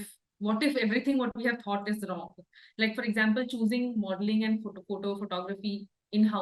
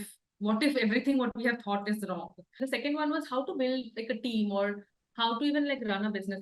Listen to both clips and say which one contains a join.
second; 1 cut; at 2.6 s

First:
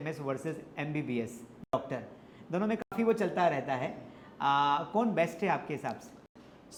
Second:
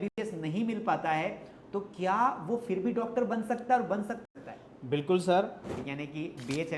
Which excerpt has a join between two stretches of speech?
second; 2 cuts; at 4.2 s, 5.7 s

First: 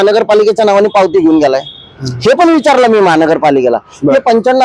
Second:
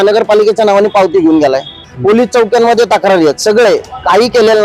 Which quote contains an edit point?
second; 1 cut; at 1.9 s

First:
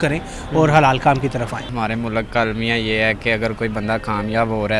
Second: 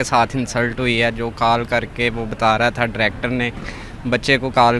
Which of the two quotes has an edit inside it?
first; 1 cut; at 1.6 s

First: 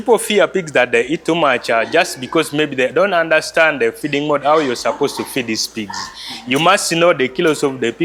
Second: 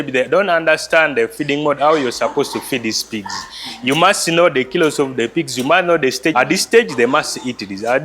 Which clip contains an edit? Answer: second; 1 cut; at 6.3 s

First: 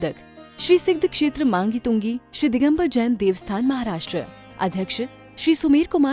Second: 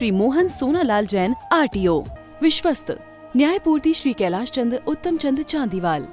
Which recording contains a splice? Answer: second; 1 cut; at 2.2 s

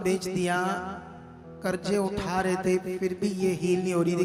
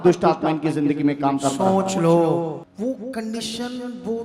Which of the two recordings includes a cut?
second; 1 cut; at 2.6 s

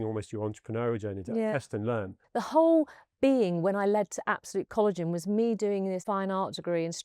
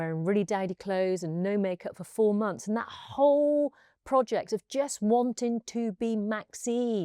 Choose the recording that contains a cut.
first; 2 cuts; at 2.2 s, 6.0 s

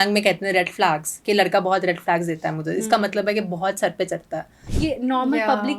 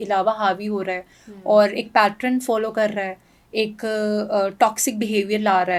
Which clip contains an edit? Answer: first; 1 cut; at 4.6 s

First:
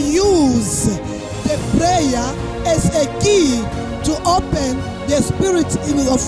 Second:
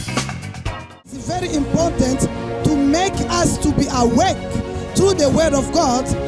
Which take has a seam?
second; 1 cut; at 0.9 s

